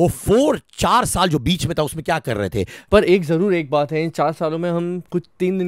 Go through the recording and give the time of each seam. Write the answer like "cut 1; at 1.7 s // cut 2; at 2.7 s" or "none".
cut 1; at 2.7 s